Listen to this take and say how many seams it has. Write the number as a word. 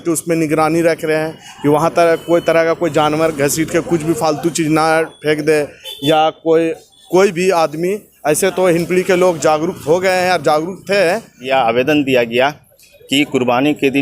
one